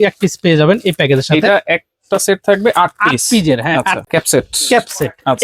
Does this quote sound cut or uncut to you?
cut